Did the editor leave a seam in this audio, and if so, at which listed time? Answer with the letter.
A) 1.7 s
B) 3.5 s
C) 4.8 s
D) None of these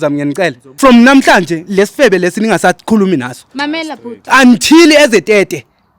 A